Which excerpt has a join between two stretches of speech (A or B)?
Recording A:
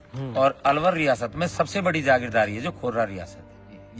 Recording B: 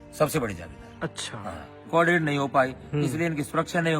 B